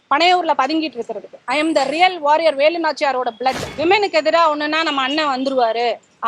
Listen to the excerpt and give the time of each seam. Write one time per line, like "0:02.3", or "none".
0:03.7